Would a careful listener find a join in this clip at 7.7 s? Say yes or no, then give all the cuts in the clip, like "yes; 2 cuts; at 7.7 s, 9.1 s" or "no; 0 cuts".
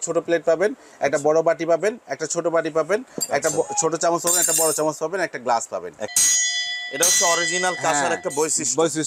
no; 1 cut; at 6.1 s